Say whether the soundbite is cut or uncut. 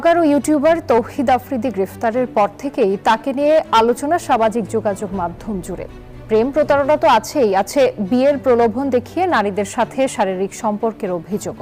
uncut